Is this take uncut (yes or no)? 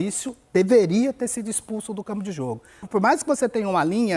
no